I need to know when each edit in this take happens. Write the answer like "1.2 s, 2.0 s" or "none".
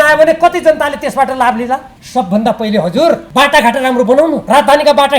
2.0 s, 3.2 s, 4.4 s

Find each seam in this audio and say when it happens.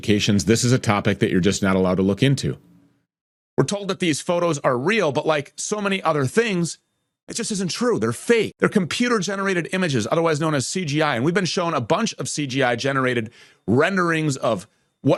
none

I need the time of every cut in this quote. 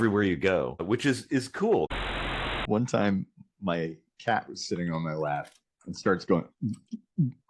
0.8 s, 2.4 s

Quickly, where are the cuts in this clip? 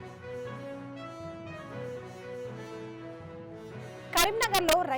1.7 s, 3.5 s

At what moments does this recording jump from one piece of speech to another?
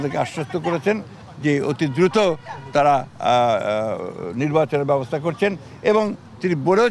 none

